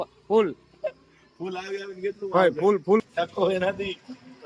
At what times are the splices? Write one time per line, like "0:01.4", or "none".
0:03.0